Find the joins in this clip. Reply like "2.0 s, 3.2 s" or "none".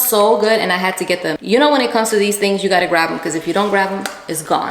1.3 s